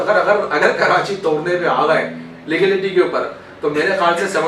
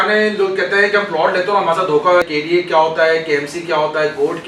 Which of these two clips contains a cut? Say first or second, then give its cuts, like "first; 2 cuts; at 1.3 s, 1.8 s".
second; 1 cut; at 2.3 s